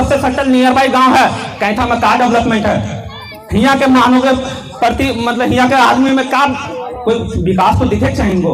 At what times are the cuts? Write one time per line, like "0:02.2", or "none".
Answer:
none

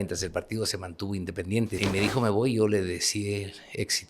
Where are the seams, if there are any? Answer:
0:01.7

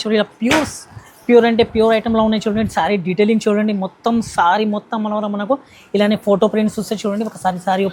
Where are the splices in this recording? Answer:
none

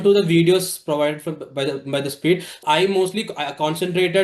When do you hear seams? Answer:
0:02.6

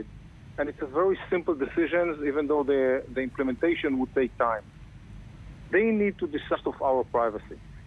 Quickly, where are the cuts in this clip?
none

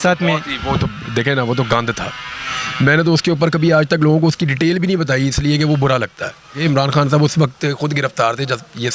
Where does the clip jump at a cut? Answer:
0:06.6

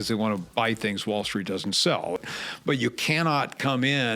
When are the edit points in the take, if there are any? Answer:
0:02.2

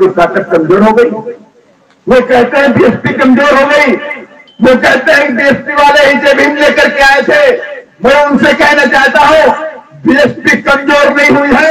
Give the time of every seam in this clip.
none

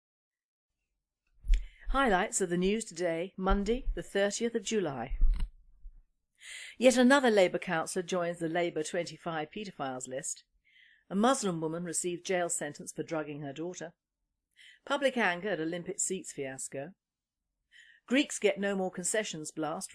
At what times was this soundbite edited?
0:02.6

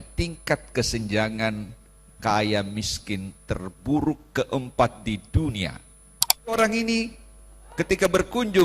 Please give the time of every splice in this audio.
0:06.6

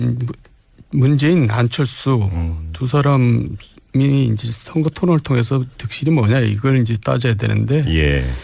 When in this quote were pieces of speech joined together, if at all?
0:06.2

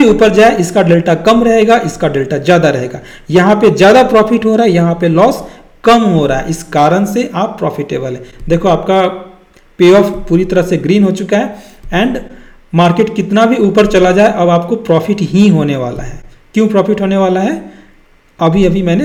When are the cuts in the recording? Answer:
none

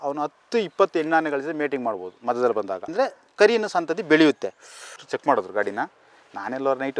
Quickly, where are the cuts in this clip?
0:05.0

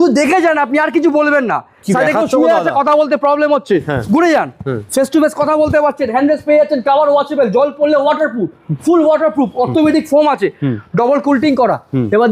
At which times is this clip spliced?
none

